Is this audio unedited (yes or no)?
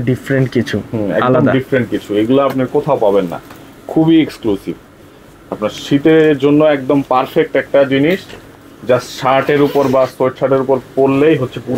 yes